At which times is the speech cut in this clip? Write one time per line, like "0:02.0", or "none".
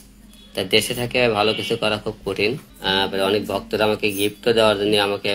0:02.7